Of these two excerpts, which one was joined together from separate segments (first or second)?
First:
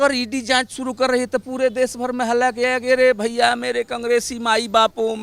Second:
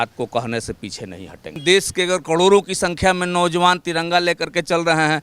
second